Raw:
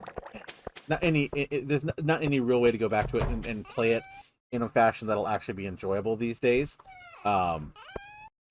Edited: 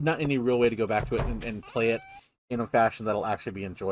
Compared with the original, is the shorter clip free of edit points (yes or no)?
yes